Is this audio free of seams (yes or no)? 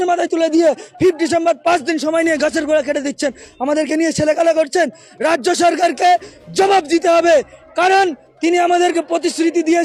yes